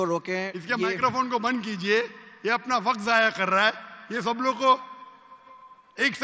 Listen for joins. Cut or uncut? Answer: uncut